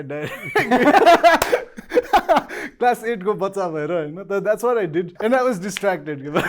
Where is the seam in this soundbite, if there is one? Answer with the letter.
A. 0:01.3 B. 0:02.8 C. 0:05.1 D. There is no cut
C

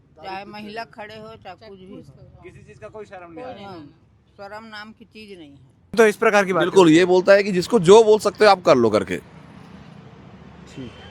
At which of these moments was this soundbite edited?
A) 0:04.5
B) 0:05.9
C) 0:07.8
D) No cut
B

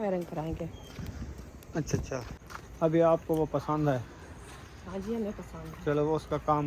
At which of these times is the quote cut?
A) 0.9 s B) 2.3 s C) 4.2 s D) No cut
B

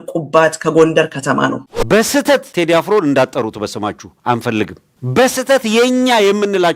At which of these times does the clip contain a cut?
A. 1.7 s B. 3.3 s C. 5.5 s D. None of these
A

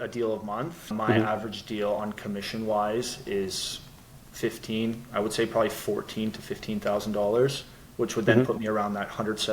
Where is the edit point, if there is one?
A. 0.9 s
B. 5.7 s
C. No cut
A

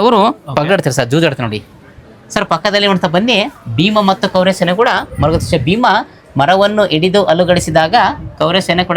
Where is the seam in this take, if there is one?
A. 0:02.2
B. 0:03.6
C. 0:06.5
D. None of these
D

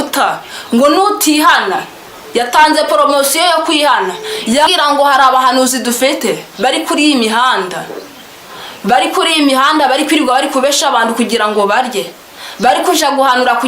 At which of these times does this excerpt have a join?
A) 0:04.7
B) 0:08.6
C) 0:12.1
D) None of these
A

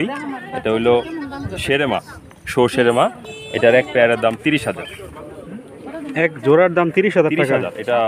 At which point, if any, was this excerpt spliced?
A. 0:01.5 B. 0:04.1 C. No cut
A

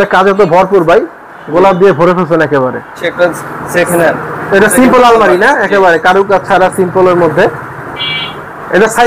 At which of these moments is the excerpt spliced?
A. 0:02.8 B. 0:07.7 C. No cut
A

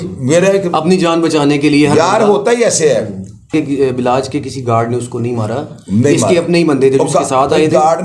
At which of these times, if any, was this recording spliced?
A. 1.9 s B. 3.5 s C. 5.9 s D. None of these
B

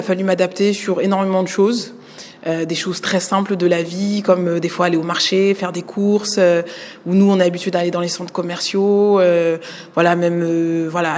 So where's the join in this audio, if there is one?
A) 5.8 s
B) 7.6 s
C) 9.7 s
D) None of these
D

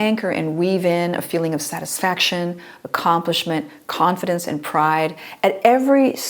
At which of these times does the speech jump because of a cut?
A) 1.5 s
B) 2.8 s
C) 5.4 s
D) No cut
D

